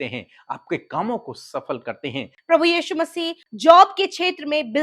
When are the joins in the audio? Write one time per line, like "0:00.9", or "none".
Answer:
0:02.3
0:03.4